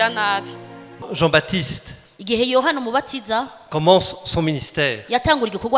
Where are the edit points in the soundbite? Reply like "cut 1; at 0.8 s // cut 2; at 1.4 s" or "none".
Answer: cut 1; at 1.0 s